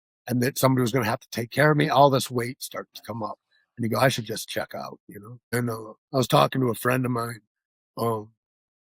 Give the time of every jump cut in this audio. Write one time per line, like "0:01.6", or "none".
0:05.3